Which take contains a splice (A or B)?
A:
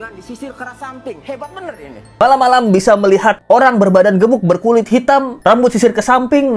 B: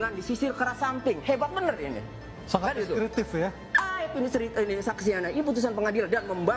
A